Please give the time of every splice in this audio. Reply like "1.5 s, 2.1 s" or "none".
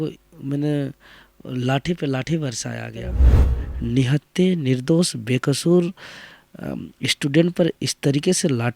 3.3 s